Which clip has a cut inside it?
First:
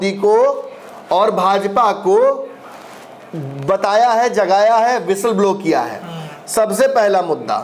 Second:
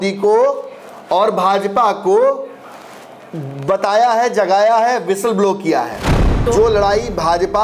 second; 1 cut; at 6.4 s

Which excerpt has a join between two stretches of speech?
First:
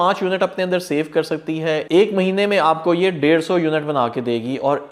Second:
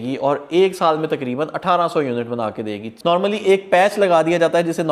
second; 1 cut; at 3.0 s

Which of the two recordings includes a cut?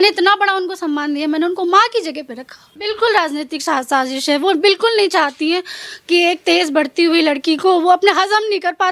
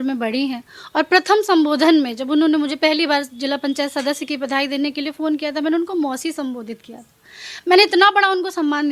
first; 1 cut; at 2.7 s

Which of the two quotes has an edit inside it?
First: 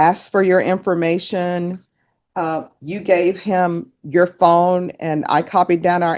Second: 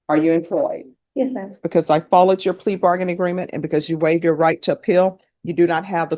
second; 1 cut; at 1.6 s

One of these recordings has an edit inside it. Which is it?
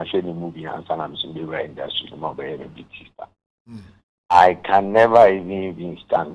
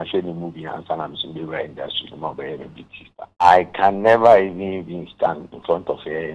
second; 1 cut; at 3.1 s

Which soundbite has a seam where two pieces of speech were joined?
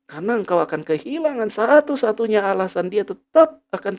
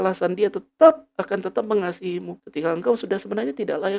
second; 1 cut; at 2.4 s

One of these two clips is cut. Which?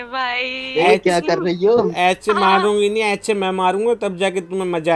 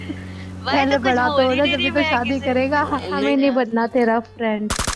second; 1 cut; at 3.1 s

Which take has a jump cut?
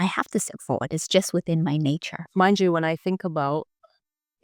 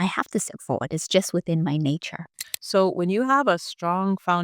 second; 1 cut; at 2.2 s

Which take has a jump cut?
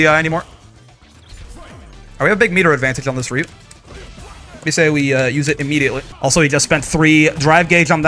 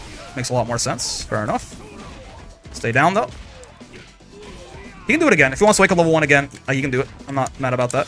first; 1 cut; at 6.1 s

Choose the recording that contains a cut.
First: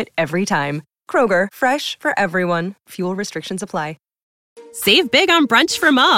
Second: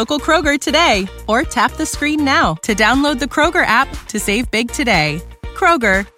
first; 1 cut; at 4.2 s

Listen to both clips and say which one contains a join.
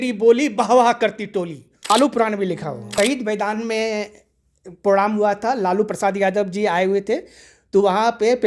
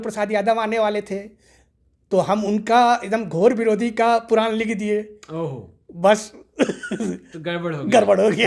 first; 2 cuts; at 1.9 s, 2.9 s

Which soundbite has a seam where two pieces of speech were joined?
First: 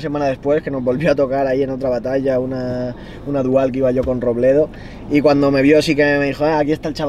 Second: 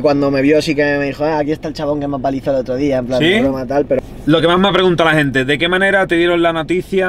second; 1 cut; at 4.0 s

